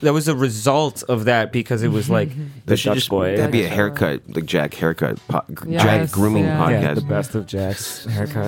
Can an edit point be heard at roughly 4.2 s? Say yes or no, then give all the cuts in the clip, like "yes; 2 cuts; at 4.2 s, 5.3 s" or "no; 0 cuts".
no; 1 cut; at 2.6 s